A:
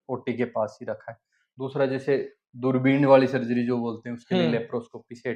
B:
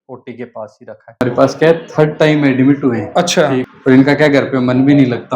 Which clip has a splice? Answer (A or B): B